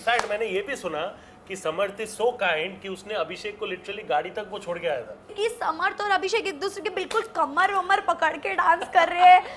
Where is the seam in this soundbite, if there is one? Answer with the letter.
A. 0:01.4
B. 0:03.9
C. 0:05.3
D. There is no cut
C